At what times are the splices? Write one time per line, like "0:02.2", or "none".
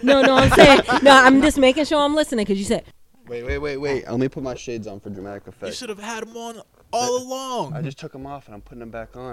0:02.9